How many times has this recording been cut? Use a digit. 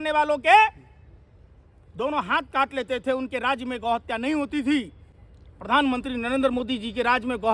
0